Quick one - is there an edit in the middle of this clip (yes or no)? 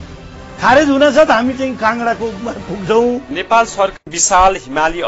yes